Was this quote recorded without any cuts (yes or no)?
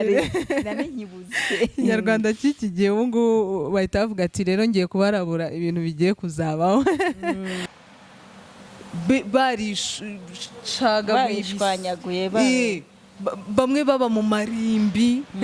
no